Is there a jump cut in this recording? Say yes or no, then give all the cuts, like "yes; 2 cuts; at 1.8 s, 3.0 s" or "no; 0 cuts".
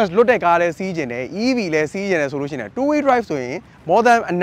no; 0 cuts